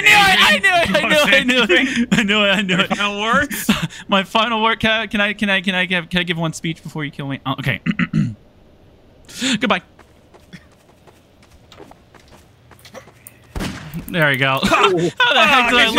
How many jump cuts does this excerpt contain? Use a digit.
1